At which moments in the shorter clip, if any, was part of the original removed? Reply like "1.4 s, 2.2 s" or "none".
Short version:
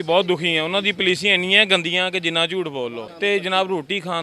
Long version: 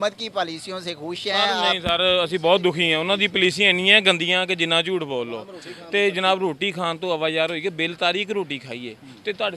3.0 s

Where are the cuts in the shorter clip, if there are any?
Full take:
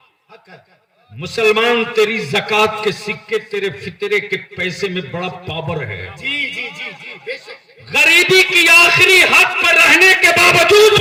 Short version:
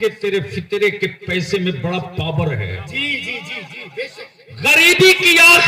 none

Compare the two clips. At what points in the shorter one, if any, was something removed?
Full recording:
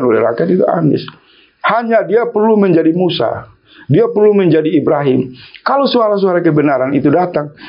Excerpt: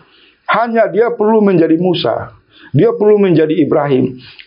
none

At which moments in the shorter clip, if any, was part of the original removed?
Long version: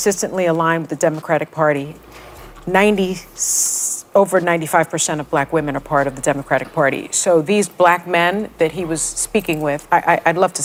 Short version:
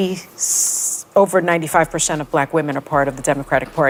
none

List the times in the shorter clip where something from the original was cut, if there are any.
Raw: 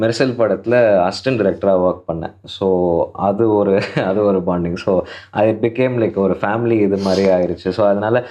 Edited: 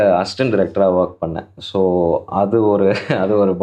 none

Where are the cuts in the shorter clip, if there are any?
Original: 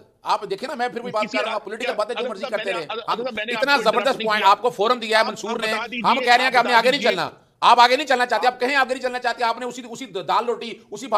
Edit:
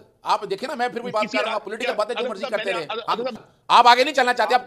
3.4 s

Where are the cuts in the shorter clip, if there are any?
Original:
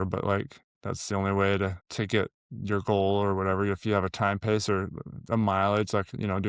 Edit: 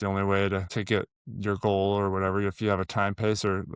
1.0 s

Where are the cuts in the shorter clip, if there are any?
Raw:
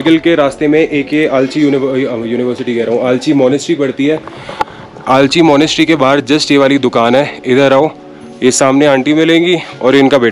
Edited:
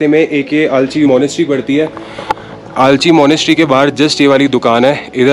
1.1 s

